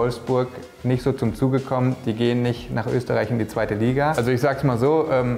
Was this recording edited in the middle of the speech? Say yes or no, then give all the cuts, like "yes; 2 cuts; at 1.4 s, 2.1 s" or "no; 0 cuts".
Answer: yes; 1 cut; at 4.2 s